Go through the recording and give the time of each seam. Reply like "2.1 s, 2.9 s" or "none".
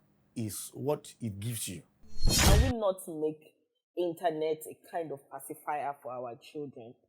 2.3 s